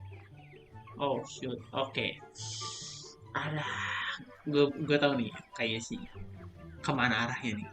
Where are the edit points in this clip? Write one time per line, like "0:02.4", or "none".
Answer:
0:01.0